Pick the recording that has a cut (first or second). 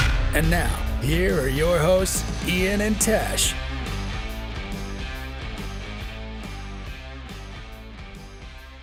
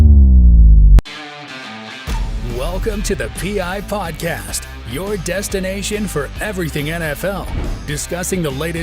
second